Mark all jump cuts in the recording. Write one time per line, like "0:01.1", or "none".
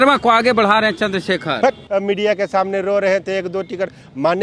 0:01.8